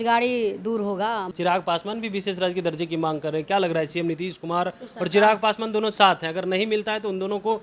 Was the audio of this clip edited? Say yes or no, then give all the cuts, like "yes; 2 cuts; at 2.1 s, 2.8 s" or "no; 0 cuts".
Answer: yes; 1 cut; at 1.3 s